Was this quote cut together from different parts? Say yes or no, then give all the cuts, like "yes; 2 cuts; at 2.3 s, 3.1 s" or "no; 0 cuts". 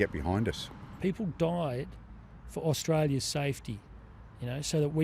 yes; 1 cut; at 0.9 s